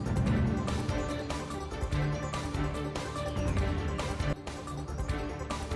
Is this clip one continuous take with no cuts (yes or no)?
no